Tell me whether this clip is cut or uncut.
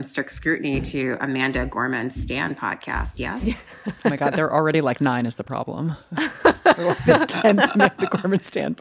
uncut